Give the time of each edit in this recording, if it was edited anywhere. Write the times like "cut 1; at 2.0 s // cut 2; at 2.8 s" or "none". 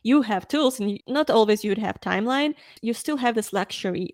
cut 1; at 1.0 s // cut 2; at 2.7 s